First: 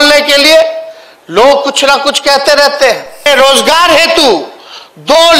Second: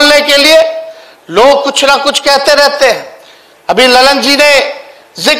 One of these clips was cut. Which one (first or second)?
first